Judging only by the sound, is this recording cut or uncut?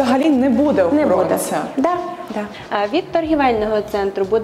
cut